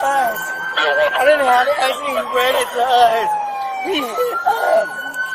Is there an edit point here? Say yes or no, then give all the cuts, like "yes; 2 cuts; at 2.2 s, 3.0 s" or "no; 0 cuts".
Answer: no; 0 cuts